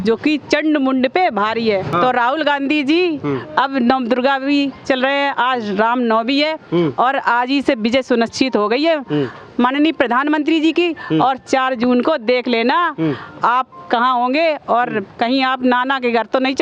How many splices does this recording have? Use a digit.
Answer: 0